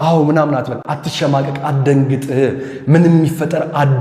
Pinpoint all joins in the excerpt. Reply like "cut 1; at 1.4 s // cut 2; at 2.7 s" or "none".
none